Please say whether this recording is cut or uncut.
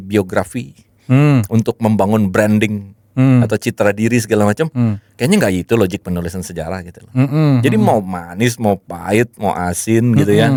uncut